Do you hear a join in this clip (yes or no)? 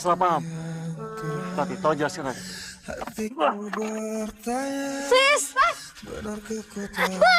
yes